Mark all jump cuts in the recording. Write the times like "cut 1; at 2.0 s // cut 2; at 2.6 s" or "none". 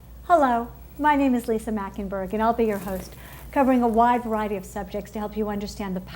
cut 1; at 3.8 s